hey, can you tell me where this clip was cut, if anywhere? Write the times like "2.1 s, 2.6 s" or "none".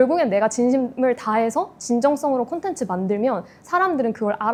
none